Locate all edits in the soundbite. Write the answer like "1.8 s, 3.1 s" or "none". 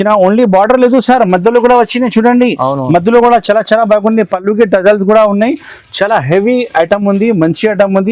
none